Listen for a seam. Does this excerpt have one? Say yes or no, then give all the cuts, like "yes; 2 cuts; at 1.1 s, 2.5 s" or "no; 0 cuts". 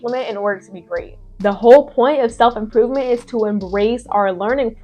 yes; 1 cut; at 1.2 s